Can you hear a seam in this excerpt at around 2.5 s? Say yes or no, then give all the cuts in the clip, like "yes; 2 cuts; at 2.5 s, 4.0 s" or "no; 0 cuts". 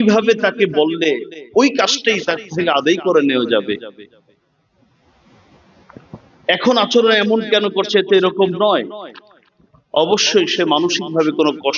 no; 0 cuts